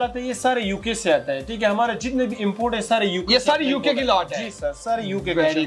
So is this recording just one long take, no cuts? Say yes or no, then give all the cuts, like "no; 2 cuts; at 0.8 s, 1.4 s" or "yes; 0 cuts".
yes; 0 cuts